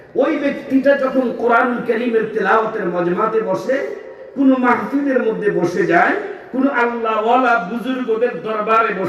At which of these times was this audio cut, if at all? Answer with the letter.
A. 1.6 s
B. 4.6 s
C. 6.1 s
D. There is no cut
D